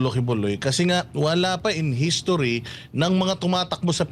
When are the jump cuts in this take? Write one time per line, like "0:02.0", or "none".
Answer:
none